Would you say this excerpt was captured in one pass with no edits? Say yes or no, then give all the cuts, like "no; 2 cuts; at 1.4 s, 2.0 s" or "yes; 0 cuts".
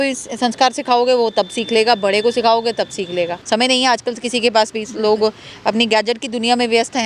no; 1 cut; at 3.4 s